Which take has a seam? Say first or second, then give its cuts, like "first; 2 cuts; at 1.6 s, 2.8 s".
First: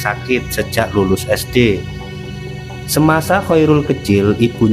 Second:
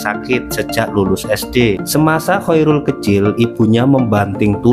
second; 1 cut; at 1.8 s